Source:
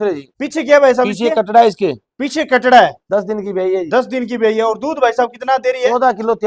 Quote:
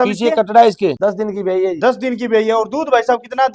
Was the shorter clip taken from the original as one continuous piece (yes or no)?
no